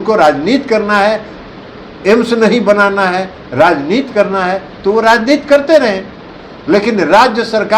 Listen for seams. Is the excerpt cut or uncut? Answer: uncut